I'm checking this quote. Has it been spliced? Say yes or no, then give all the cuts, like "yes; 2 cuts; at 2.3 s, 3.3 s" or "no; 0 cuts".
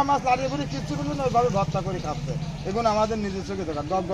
no; 0 cuts